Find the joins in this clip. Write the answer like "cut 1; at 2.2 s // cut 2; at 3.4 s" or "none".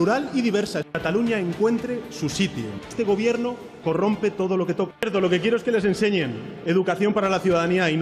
cut 1; at 0.9 s // cut 2; at 2.9 s // cut 3; at 5.1 s